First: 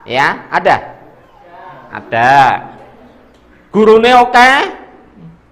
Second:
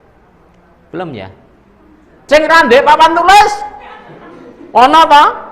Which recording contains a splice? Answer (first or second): second